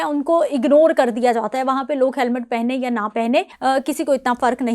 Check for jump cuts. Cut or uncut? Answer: cut